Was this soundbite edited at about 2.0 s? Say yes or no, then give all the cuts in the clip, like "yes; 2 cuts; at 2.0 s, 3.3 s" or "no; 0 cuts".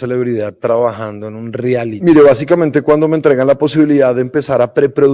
yes; 1 cut; at 2.0 s